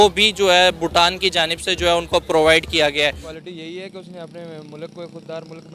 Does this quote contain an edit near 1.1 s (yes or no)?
no